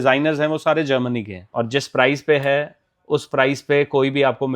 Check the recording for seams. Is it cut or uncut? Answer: cut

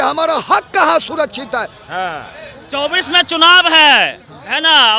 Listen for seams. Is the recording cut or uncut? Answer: uncut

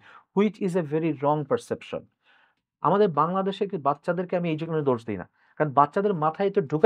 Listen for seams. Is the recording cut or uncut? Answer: cut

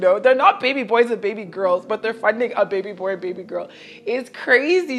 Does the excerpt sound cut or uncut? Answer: uncut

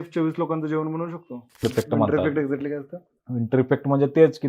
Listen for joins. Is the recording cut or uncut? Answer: cut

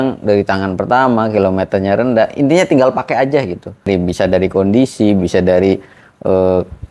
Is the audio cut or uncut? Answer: cut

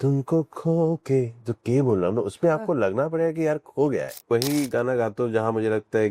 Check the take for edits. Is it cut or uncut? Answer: cut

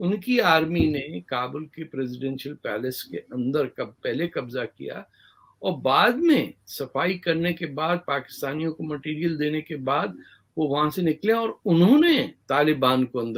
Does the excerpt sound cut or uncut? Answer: uncut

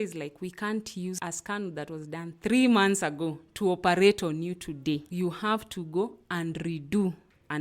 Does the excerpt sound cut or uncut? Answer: cut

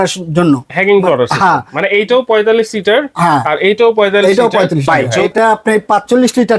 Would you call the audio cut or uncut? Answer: cut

